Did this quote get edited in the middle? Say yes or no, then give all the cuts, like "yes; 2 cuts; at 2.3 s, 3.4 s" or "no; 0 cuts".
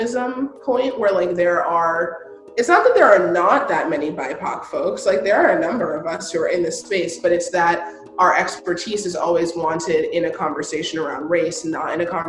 no; 0 cuts